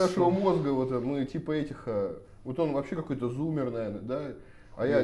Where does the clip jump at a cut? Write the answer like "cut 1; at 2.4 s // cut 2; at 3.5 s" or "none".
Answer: none